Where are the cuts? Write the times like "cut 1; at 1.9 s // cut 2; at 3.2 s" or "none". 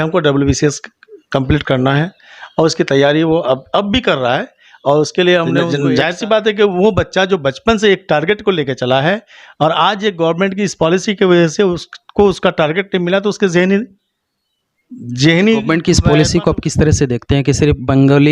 cut 1; at 5.6 s // cut 2; at 15.7 s